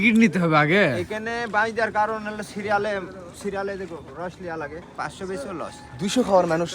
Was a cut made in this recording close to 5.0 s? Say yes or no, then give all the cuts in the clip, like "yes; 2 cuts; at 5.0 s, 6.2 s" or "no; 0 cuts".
yes; 1 cut; at 5.0 s